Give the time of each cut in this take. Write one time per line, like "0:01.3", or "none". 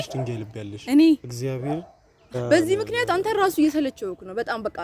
0:02.4